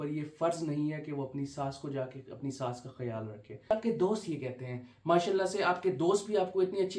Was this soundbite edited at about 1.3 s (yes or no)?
no